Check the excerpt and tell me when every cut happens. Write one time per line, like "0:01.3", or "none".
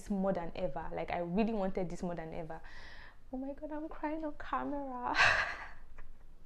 none